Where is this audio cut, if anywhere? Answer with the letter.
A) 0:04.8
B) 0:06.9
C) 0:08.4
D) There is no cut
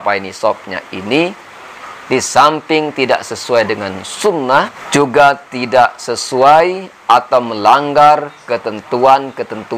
A